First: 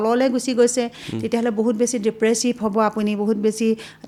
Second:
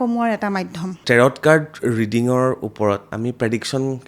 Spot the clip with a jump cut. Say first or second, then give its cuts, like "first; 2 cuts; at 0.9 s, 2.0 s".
second; 2 cuts; at 0.9 s, 3.1 s